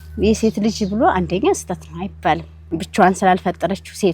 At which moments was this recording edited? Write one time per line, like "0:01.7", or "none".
0:02.5